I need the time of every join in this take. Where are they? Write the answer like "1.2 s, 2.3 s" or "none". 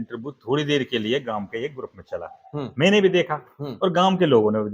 none